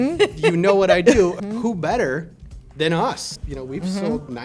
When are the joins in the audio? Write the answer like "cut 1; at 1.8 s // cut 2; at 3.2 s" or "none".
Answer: cut 1; at 1.4 s // cut 2; at 3.4 s